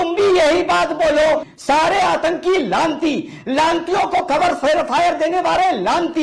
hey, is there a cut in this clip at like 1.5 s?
yes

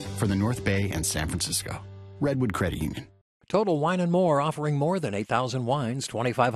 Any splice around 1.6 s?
no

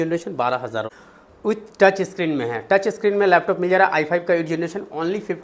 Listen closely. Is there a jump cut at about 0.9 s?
yes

